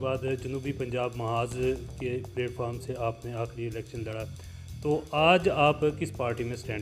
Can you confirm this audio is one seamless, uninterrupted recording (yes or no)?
yes